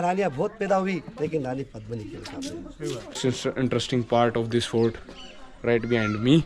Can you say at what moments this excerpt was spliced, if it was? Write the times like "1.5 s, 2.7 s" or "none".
3.1 s